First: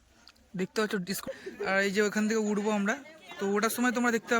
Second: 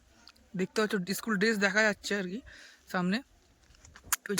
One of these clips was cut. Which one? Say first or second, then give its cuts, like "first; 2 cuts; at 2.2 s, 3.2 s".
first; 1 cut; at 1.2 s